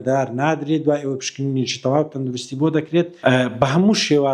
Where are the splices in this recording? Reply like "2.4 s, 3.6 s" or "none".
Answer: 3.1 s